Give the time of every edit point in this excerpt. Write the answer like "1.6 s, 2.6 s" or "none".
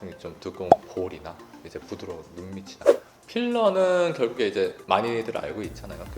3.1 s